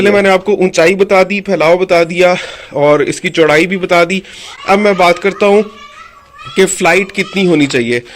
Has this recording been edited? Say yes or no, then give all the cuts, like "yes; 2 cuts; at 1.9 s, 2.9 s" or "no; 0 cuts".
no; 0 cuts